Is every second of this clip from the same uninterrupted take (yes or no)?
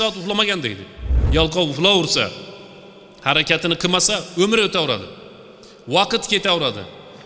no